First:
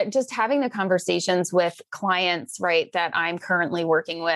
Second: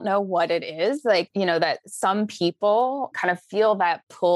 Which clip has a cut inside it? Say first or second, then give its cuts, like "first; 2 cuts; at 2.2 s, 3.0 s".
second; 2 cuts; at 1.3 s, 3.1 s